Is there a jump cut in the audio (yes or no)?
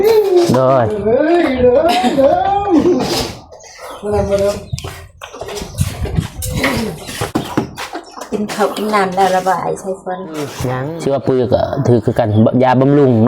yes